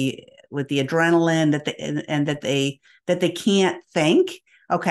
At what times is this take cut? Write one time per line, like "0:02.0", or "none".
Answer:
none